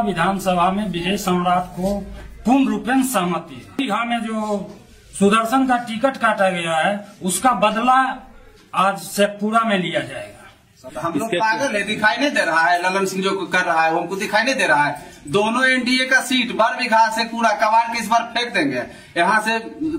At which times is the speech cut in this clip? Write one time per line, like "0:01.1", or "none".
0:03.7
0:10.8